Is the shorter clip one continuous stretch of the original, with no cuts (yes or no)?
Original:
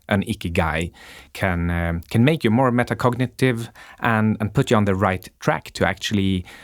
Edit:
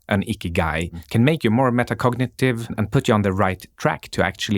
no